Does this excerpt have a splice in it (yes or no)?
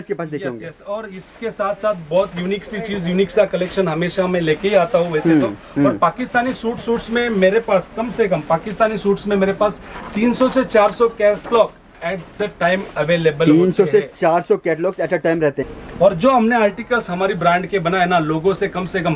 yes